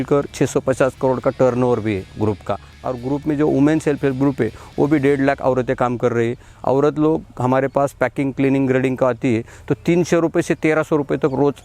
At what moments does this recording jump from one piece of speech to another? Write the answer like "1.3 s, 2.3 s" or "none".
2.8 s